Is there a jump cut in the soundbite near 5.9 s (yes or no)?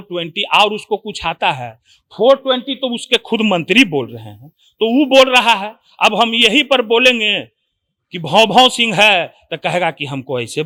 no